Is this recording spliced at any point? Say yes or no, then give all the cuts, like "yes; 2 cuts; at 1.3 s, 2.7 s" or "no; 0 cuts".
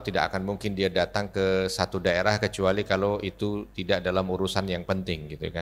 no; 0 cuts